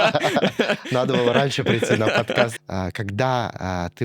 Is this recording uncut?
no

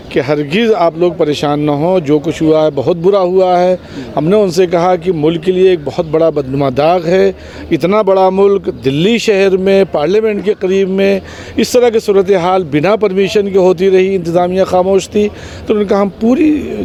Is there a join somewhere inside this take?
no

